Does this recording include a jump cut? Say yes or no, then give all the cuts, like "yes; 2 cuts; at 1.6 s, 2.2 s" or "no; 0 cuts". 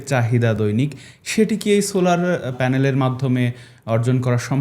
yes; 1 cut; at 2.6 s